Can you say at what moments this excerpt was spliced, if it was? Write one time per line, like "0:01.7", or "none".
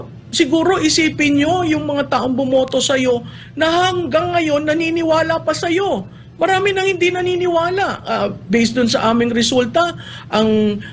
none